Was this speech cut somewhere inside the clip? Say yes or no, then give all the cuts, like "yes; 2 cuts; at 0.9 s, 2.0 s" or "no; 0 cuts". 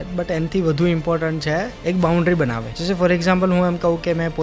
yes; 2 cuts; at 1.7 s, 2.7 s